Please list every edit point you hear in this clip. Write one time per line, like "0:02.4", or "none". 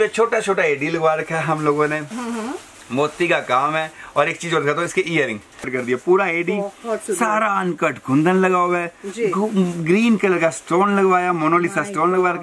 0:05.7